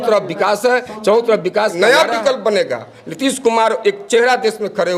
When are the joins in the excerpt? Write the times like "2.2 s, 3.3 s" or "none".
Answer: 1.8 s